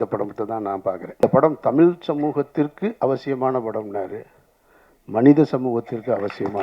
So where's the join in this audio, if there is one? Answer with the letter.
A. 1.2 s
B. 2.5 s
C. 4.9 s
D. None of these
A